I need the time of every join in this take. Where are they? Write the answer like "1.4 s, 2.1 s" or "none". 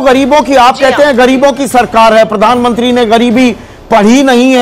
none